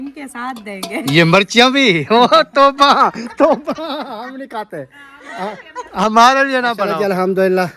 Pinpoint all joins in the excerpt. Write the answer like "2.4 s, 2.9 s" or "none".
6.8 s